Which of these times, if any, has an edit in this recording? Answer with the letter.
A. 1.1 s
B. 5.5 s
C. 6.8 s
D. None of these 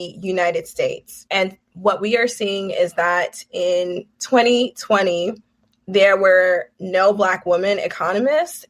A